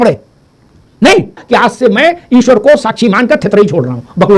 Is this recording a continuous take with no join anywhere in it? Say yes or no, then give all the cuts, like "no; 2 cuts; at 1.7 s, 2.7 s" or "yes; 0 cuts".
no; 1 cut; at 1.4 s